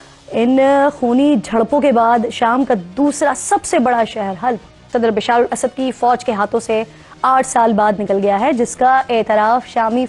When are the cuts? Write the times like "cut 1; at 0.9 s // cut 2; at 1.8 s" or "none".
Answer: cut 1; at 4.8 s